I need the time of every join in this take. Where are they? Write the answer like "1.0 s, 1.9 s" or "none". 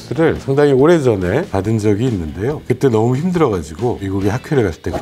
4.0 s